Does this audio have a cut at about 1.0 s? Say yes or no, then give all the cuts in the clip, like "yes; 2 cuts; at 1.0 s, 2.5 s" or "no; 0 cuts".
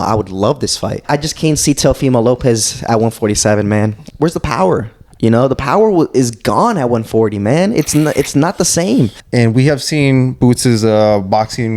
yes; 3 cuts; at 1.0 s, 4.0 s, 9.2 s